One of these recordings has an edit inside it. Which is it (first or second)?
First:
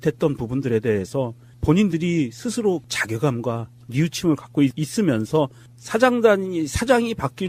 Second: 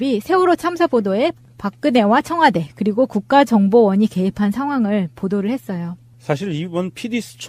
second